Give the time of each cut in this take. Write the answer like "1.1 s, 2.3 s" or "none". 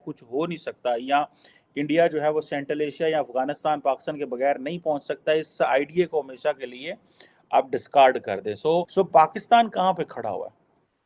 8.9 s